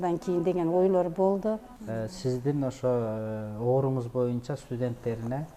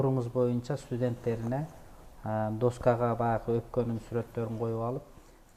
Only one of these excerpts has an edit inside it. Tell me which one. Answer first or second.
first